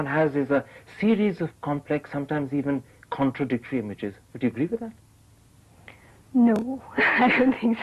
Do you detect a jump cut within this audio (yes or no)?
yes